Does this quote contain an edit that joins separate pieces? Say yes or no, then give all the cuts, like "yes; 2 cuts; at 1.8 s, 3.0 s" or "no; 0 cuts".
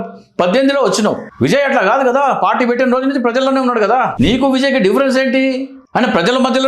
yes; 3 cuts; at 1.3 s, 4.1 s, 5.7 s